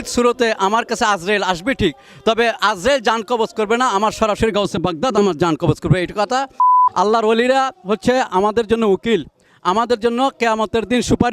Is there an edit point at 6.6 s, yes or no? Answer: yes